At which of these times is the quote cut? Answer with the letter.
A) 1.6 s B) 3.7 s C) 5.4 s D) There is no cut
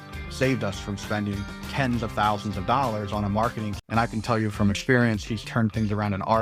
B